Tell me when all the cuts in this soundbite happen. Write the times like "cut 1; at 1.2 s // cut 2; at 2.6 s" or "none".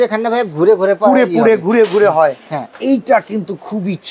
cut 1; at 2.7 s